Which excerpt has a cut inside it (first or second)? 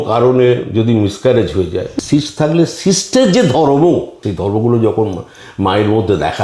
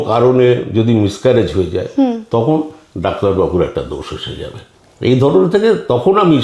first